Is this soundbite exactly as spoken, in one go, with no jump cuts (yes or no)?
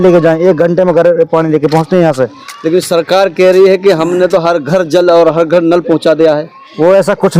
yes